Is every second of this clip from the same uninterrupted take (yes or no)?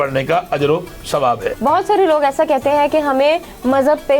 no